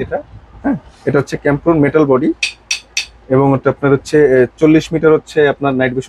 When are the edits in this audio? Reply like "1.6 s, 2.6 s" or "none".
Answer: none